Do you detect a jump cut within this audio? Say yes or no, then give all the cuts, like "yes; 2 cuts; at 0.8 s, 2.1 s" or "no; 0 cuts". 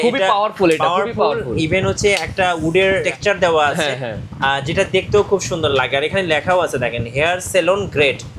yes; 2 cuts; at 3.1 s, 5.7 s